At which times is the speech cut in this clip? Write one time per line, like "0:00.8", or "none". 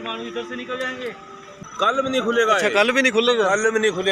0:01.5